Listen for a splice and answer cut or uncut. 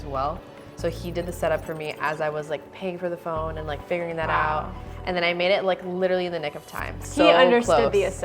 cut